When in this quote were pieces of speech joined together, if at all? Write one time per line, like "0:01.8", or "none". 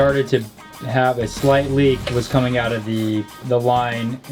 0:02.0
0:03.3